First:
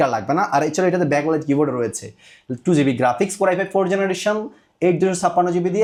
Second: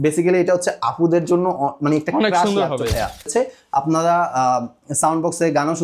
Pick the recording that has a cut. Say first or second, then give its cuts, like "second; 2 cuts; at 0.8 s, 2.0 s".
second; 1 cut; at 3.3 s